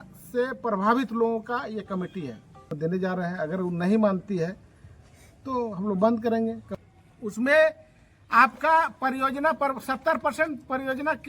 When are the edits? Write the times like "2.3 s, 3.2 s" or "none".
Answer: 2.7 s, 6.7 s